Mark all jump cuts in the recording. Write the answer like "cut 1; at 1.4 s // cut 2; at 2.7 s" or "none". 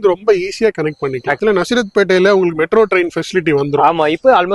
cut 1; at 1.4 s